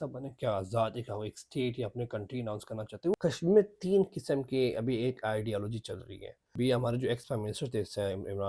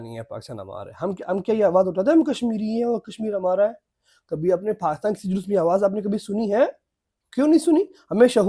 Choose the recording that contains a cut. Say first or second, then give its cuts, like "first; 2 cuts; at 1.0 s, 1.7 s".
first; 2 cuts; at 3.1 s, 6.5 s